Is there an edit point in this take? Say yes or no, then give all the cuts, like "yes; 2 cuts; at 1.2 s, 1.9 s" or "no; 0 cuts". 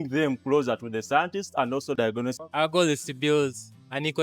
yes; 1 cut; at 2.4 s